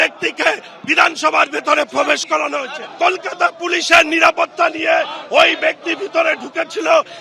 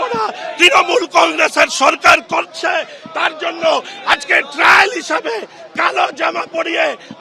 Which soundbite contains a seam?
first; 1 cut; at 2.8 s

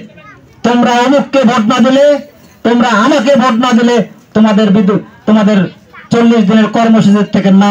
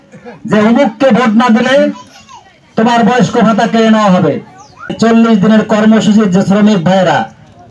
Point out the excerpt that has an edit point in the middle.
second; 1 cut; at 4.9 s

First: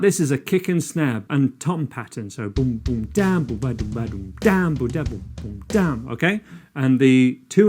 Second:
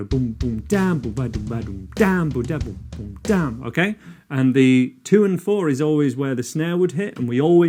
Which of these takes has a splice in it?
first; 1 cut; at 1.2 s

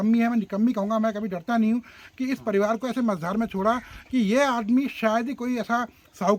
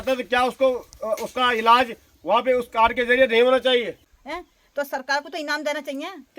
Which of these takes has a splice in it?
second; 1 cut; at 4.1 s

